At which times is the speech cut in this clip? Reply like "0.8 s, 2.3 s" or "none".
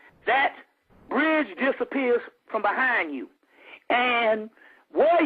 4.0 s